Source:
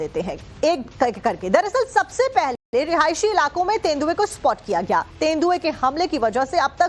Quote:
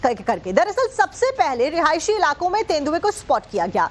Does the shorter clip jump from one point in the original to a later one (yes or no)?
yes